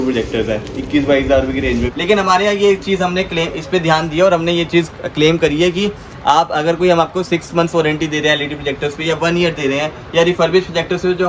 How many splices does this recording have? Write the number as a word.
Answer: one